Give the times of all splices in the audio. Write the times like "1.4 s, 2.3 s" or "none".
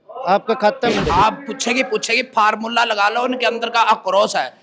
1.0 s